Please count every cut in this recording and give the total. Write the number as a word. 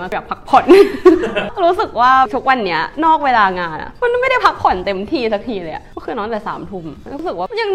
zero